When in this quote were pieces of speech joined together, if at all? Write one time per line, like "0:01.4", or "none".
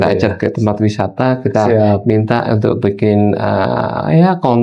none